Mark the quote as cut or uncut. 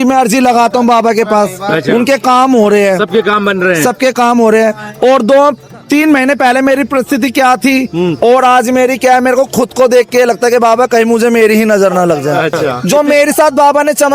cut